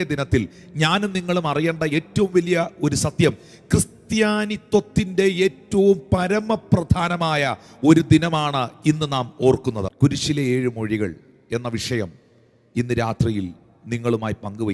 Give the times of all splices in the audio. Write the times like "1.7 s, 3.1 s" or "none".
9.9 s